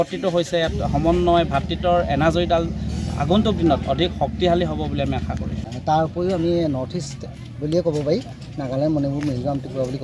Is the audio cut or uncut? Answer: cut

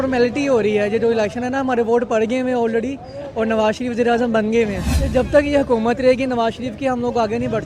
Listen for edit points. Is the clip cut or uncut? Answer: cut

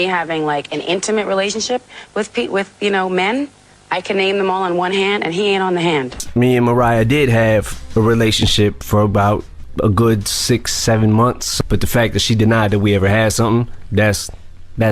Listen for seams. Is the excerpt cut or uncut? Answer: cut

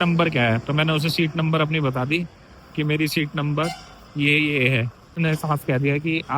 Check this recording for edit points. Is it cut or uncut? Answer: cut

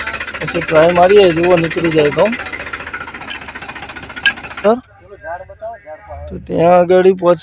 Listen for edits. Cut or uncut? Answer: cut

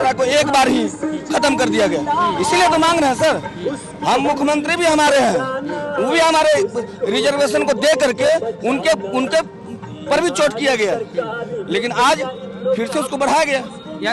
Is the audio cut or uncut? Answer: uncut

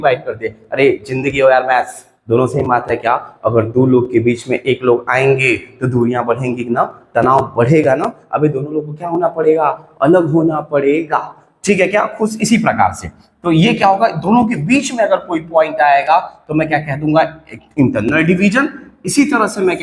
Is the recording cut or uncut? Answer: uncut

